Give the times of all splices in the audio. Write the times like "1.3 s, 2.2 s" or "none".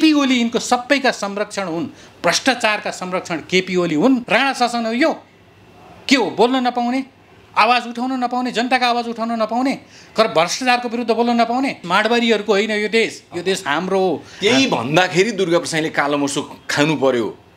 4.2 s, 11.8 s